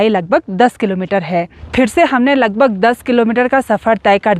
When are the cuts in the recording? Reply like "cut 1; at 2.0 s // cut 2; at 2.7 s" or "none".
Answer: cut 1; at 1.6 s